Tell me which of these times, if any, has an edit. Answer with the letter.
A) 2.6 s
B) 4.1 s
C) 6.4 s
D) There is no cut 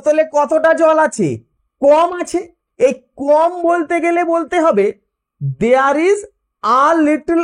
A